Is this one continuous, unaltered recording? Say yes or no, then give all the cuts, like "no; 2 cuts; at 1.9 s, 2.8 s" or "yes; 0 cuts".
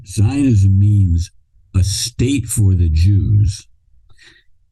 yes; 0 cuts